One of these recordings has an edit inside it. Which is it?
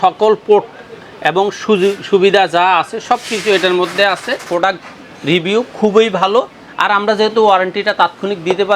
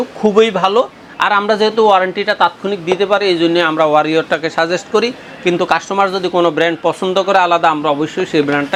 first; 1 cut; at 4.5 s

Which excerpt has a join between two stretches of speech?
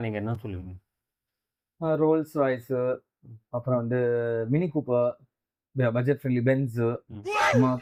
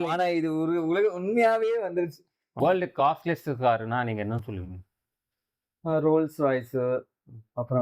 second; 1 cut; at 2.5 s

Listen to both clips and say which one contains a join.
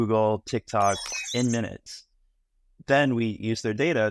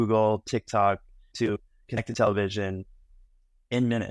first; 1 cut; at 1.1 s

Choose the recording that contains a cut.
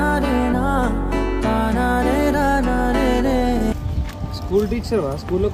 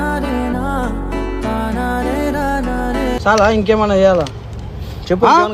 second; 1 cut; at 3.2 s

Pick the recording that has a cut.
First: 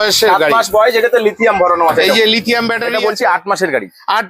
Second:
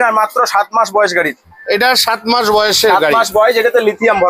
first; 1 cut; at 2.8 s

